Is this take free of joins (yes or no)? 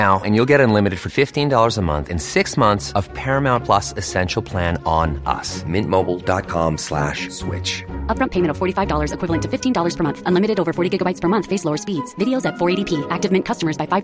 yes